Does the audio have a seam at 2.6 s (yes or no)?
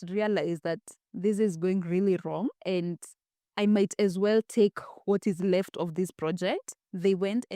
yes